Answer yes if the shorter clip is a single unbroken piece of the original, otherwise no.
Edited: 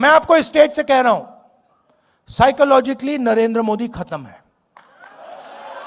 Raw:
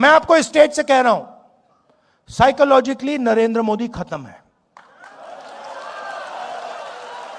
yes